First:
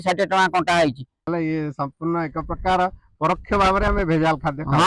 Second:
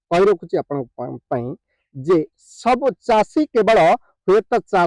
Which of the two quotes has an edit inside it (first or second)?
first